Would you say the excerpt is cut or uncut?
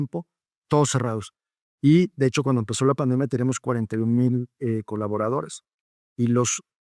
uncut